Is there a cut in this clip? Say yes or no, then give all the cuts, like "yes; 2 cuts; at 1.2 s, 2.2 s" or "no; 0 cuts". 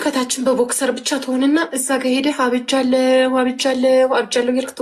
no; 0 cuts